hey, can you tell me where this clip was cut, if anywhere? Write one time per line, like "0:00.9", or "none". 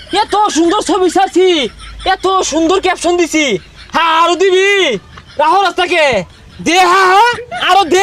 none